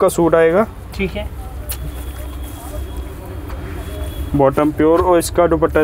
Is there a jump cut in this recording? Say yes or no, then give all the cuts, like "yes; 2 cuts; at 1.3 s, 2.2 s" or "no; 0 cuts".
no; 0 cuts